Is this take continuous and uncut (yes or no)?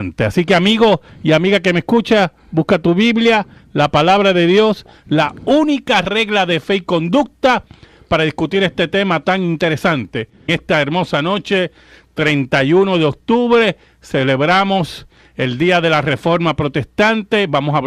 no